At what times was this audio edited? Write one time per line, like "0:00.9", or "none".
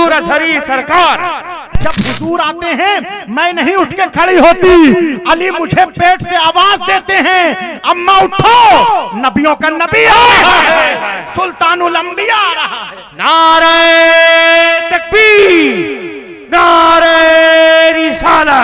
0:01.7